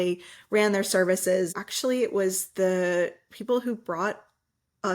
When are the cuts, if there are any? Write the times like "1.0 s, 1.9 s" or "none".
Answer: 1.6 s

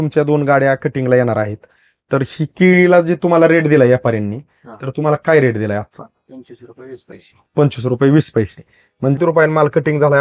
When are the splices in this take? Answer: 9.1 s

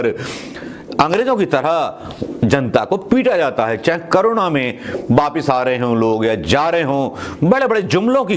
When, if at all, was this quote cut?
none

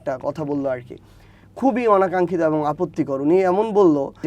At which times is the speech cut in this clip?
none

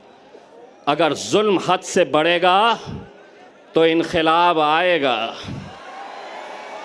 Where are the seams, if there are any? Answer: none

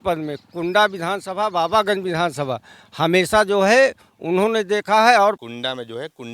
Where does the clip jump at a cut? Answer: 5.4 s

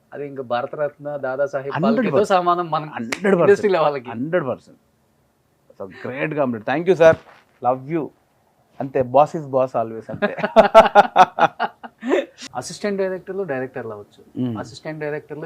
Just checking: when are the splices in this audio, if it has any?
12.4 s

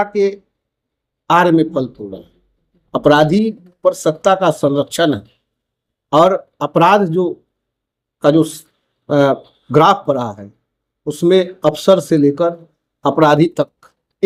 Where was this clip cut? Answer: none

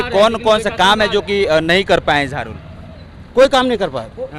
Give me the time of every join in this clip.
none

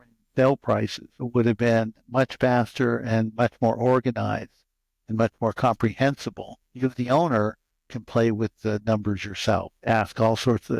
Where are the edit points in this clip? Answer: 6.7 s

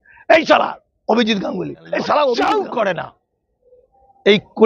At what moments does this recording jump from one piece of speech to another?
2.4 s

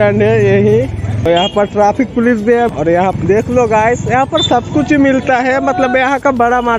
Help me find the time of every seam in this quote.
1.2 s, 3.2 s

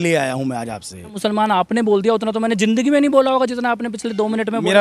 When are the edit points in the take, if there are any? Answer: 1.2 s

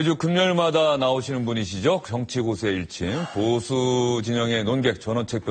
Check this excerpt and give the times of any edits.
none

